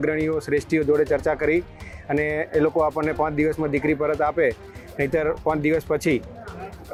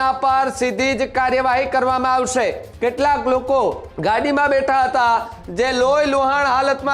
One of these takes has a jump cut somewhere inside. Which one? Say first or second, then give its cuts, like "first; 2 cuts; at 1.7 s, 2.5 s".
second; 2 cuts; at 2.7 s, 3.9 s